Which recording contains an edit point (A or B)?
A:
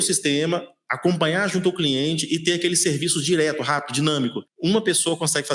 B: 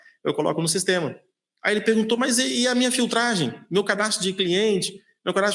A